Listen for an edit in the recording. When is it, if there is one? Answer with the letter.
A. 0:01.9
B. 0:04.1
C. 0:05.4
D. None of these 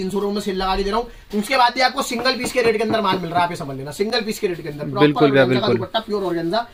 D